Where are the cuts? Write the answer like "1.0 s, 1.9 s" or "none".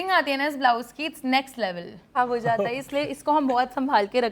2.0 s